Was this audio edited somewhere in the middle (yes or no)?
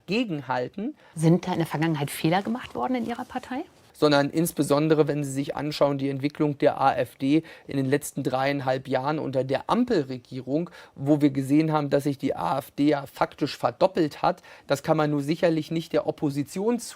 yes